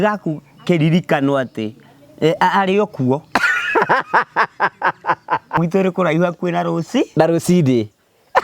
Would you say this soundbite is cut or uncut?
cut